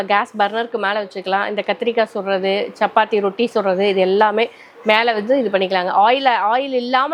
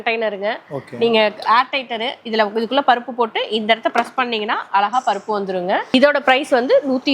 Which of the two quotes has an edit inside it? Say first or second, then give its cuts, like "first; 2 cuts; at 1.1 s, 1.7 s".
second; 1 cut; at 5.9 s